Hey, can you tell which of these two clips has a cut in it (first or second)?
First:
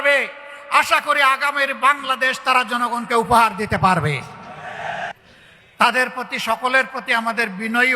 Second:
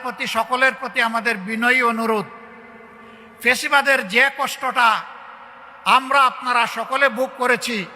first